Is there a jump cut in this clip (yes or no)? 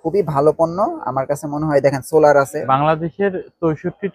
yes